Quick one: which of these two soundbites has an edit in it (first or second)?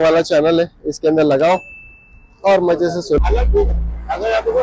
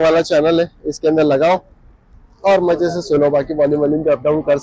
first